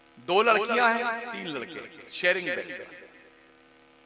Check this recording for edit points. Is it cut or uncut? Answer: uncut